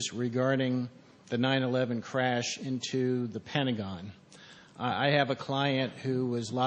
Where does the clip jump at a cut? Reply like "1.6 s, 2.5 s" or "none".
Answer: 3.8 s